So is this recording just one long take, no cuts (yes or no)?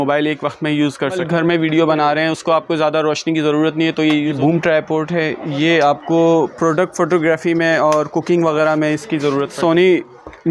no